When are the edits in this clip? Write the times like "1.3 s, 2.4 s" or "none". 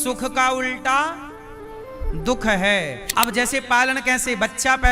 3.1 s

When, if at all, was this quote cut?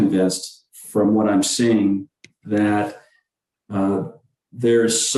none

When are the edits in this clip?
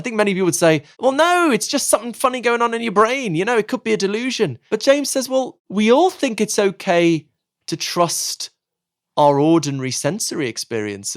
0.9 s, 4.6 s, 5.6 s

